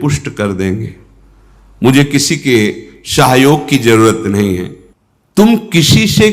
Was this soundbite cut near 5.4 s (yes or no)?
yes